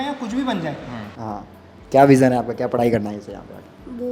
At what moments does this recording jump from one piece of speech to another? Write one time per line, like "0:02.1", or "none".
0:01.0